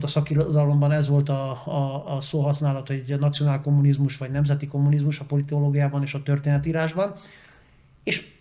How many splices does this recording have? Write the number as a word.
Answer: zero